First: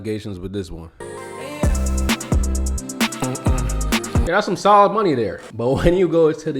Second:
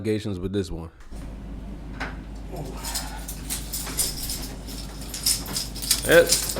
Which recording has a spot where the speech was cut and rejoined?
first; 2 cuts; at 1.1 s, 4.2 s

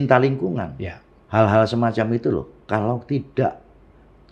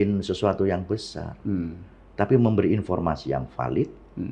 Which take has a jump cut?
first; 1 cut; at 1.1 s

